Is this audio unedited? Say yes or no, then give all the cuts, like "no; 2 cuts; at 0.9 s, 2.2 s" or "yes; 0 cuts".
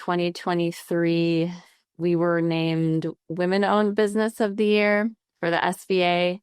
no; 1 cut; at 5.3 s